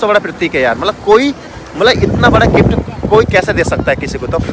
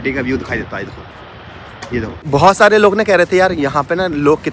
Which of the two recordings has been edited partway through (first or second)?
second